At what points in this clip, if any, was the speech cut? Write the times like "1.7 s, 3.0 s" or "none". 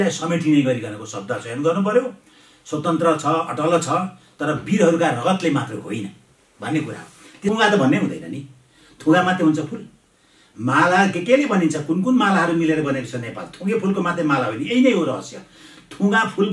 7.5 s